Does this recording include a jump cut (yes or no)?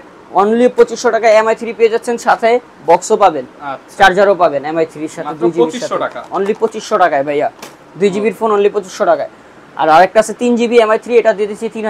no